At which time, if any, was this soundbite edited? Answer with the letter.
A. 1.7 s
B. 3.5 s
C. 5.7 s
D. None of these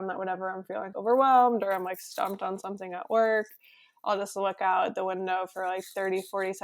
D